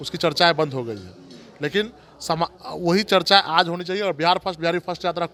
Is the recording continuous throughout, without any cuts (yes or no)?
yes